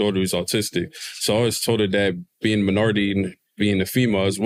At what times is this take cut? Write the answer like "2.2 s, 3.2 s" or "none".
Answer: none